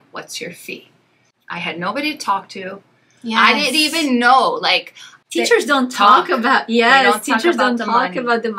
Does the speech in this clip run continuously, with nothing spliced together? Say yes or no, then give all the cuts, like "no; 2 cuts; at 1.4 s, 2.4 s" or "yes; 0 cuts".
no; 2 cuts; at 1.3 s, 5.1 s